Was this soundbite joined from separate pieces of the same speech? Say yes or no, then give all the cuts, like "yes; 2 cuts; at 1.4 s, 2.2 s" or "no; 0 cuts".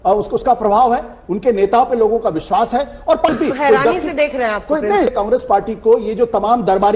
yes; 2 cuts; at 3.3 s, 5.1 s